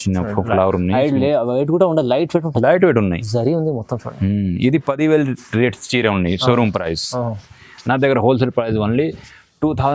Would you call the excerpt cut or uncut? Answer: uncut